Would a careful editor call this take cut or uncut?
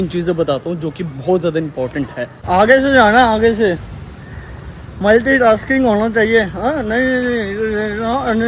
cut